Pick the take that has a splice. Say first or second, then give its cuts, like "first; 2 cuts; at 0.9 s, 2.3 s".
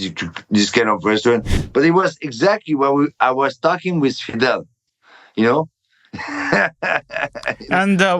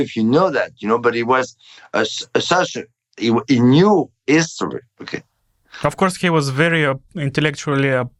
first; 1 cut; at 1.6 s